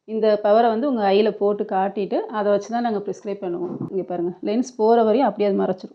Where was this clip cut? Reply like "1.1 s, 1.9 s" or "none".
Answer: 3.9 s